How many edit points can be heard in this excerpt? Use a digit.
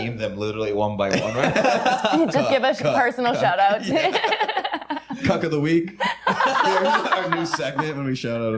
0